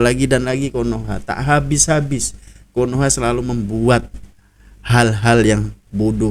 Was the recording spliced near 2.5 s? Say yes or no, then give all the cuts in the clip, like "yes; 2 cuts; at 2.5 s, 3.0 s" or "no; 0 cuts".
no; 0 cuts